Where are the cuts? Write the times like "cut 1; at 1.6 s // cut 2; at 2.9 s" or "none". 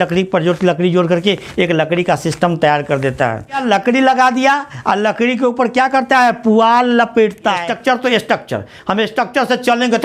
cut 1; at 3.6 s // cut 2; at 7.7 s